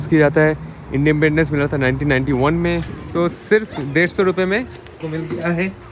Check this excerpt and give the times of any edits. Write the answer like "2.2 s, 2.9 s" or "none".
3.0 s, 5.0 s